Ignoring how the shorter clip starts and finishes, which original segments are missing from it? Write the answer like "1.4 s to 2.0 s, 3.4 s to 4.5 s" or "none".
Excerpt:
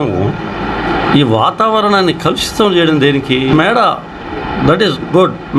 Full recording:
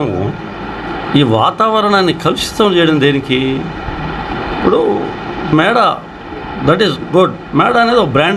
3.5 s to 5.5 s